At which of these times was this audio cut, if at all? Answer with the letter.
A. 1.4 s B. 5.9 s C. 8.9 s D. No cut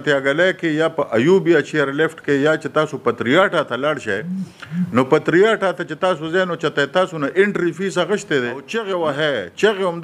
C